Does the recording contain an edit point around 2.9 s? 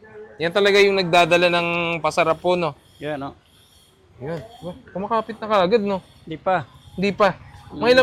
no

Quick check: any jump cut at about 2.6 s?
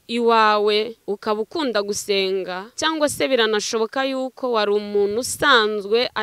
yes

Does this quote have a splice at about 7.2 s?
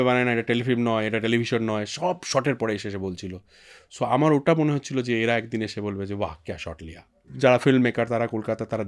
yes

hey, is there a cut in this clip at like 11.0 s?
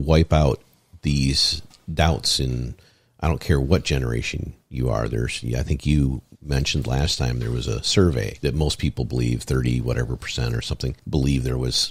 yes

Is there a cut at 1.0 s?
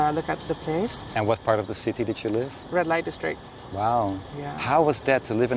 yes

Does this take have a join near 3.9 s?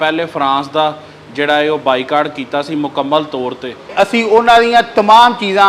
yes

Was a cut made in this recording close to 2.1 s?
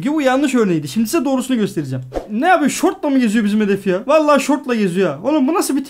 yes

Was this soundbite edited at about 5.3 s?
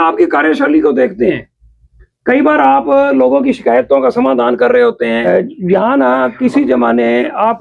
yes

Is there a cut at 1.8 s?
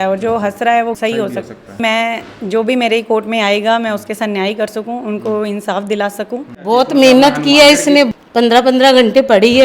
yes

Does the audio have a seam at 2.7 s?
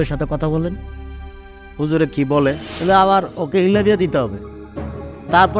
yes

